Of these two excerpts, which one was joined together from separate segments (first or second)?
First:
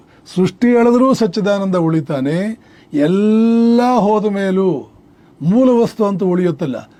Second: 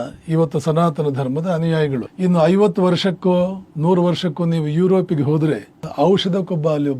second